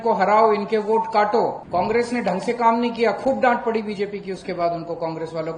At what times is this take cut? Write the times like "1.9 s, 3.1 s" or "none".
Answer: 1.6 s